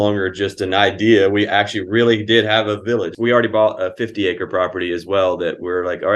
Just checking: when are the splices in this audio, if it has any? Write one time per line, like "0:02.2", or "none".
0:03.1